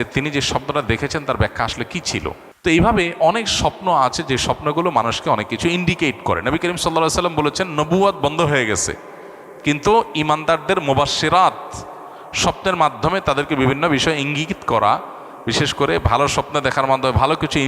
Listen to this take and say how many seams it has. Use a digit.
1